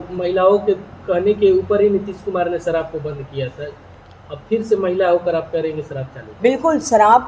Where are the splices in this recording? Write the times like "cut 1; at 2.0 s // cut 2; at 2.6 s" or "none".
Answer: none